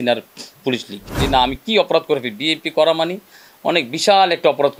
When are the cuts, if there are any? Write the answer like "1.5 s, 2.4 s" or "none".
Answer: 1.1 s